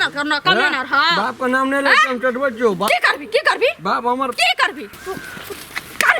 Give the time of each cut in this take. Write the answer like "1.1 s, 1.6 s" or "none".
4.9 s